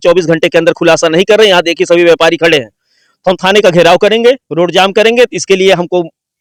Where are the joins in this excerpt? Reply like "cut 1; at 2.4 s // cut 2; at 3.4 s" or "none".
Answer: none